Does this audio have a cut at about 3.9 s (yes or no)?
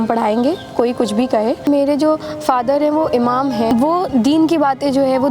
yes